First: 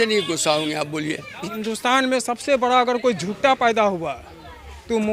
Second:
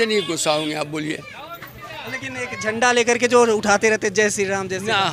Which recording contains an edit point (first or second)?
first